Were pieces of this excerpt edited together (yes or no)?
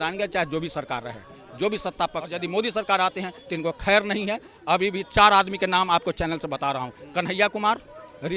yes